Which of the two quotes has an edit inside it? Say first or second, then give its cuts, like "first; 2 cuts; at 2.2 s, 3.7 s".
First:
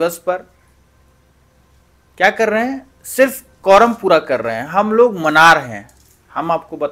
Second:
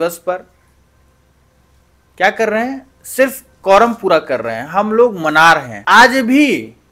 second; 1 cut; at 5.7 s